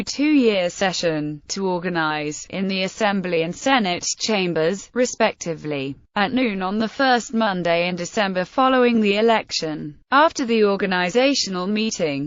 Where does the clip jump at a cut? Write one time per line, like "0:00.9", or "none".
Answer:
0:04.9